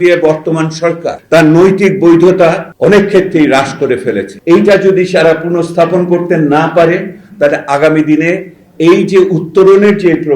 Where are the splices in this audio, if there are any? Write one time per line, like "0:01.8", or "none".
0:01.1
0:02.7
0:04.3